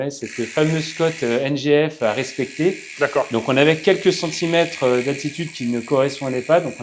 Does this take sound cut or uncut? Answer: uncut